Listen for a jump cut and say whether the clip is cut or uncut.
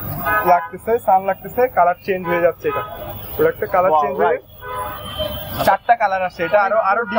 uncut